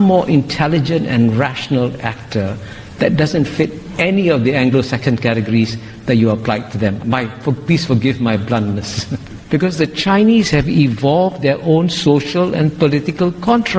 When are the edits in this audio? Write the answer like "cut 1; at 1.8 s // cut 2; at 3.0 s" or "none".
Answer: cut 1; at 9.2 s